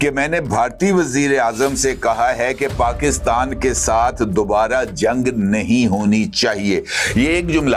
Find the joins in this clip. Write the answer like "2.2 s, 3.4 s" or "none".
none